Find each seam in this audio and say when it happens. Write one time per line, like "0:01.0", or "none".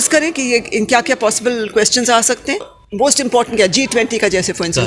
0:02.8